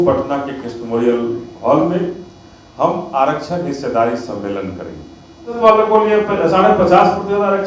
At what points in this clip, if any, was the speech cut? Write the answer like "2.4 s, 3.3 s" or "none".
5.6 s